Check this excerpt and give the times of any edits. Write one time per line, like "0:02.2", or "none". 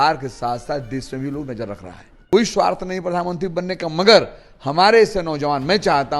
0:02.2